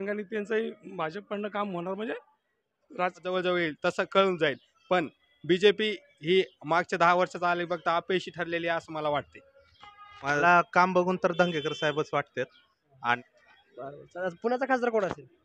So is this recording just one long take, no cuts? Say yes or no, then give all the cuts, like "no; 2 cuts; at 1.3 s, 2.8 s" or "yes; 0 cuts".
no; 3 cuts; at 3.2 s, 10.4 s, 13.2 s